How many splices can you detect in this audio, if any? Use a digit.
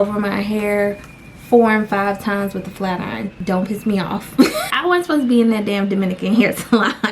2